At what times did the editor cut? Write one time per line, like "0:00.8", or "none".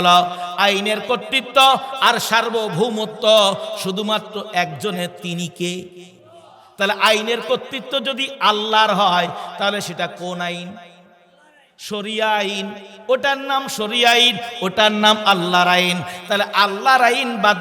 none

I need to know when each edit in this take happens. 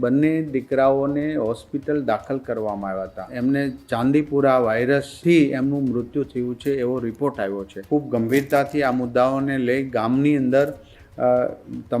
0:03.3
0:07.7

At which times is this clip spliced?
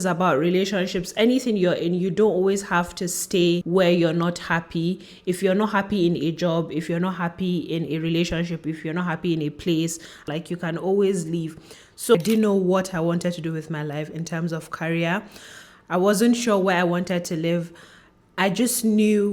0:03.6
0:10.3
0:12.1

